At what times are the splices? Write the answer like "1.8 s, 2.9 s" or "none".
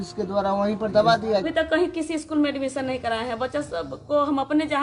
1.4 s